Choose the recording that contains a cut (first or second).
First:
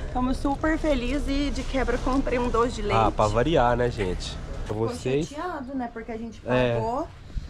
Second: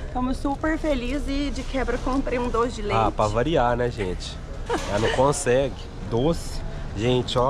first